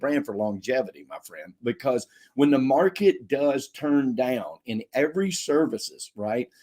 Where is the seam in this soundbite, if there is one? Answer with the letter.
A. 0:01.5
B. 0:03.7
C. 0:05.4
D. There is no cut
A